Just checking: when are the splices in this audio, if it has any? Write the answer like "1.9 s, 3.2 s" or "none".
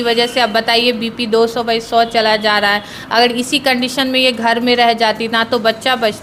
none